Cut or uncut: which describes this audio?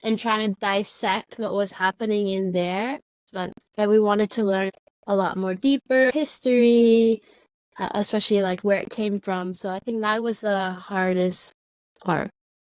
cut